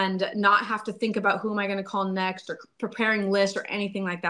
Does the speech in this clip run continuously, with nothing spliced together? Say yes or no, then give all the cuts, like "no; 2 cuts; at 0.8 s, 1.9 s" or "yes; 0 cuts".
yes; 0 cuts